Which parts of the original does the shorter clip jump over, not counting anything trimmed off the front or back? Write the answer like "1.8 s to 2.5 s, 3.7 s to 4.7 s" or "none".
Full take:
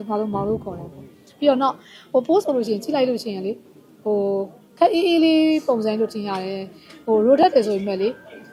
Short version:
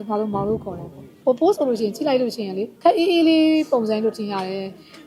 1.0 s to 1.9 s, 3.5 s to 4.6 s